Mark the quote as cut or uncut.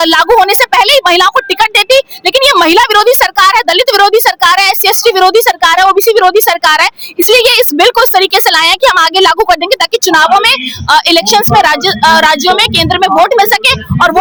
uncut